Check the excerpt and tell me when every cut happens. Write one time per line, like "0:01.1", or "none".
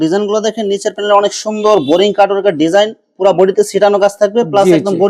none

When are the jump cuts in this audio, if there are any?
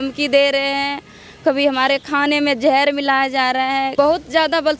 0:03.9

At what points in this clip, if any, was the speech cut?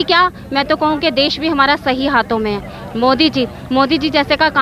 none

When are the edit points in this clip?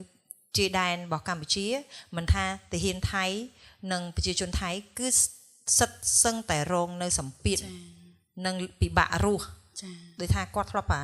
none

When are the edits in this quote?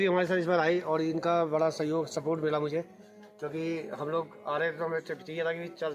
none

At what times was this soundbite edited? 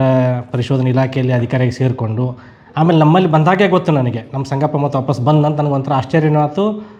none

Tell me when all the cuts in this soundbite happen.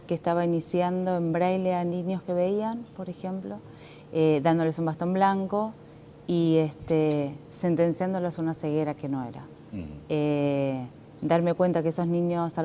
none

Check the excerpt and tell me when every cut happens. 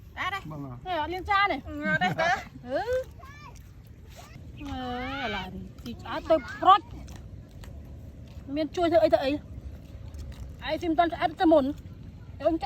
0:04.4

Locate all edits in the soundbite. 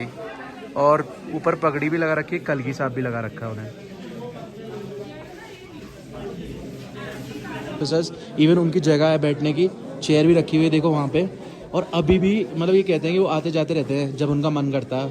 0:07.8

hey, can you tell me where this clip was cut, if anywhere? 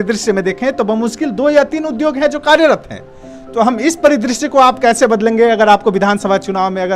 none

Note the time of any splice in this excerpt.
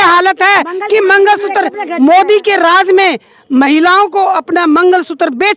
none

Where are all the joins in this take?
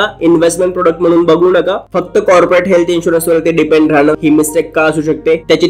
0:01.8
0:04.2

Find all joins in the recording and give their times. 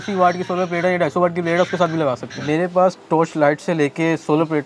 0:02.3

